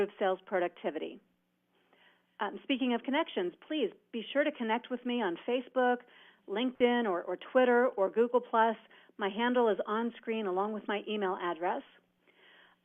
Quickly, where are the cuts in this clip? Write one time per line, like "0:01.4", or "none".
none